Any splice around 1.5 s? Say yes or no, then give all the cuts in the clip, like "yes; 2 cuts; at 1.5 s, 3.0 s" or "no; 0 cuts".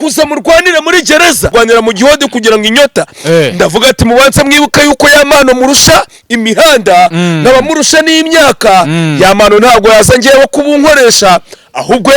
yes; 1 cut; at 1.5 s